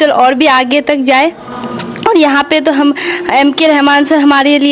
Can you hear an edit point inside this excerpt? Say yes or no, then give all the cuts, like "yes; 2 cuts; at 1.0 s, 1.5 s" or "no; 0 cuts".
no; 0 cuts